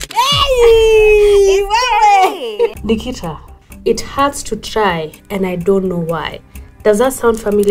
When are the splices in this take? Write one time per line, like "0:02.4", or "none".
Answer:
0:02.8